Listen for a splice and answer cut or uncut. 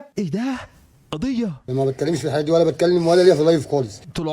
cut